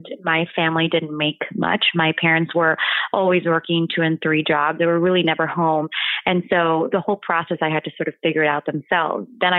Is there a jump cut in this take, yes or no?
no